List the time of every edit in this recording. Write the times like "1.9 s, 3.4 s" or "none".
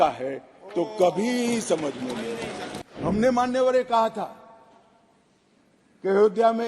3.1 s